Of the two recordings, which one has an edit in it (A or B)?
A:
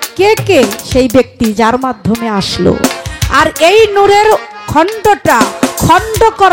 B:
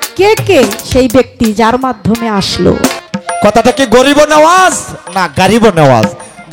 B